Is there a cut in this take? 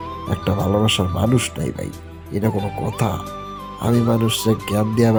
no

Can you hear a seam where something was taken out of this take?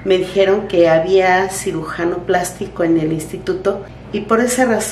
yes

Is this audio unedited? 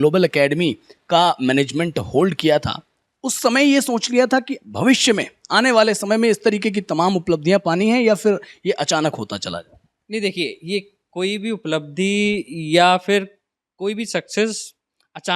yes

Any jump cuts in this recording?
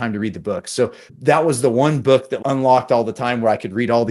yes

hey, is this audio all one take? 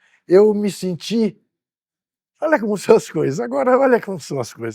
yes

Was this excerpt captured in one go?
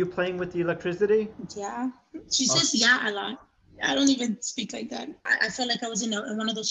no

